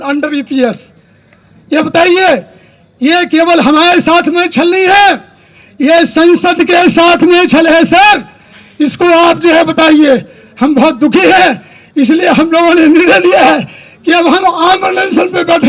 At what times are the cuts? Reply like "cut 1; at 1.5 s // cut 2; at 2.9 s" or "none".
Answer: none